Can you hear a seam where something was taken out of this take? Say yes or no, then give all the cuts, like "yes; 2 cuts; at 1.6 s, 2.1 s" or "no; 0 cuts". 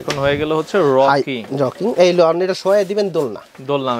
no; 0 cuts